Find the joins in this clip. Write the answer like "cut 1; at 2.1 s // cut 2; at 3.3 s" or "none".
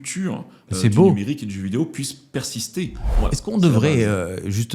cut 1; at 3.0 s